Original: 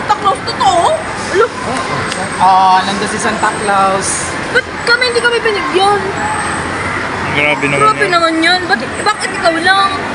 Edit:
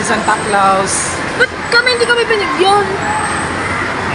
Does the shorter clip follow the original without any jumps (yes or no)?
yes